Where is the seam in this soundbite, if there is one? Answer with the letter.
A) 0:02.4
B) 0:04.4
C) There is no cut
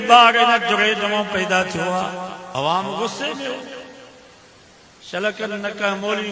A